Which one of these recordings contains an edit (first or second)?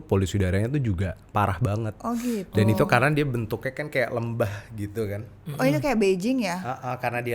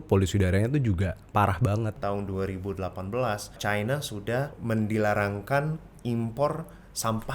second